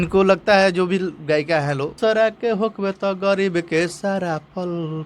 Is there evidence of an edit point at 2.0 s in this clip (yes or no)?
yes